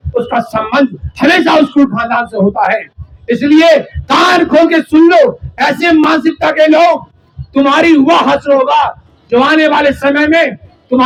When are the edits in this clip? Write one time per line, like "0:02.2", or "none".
none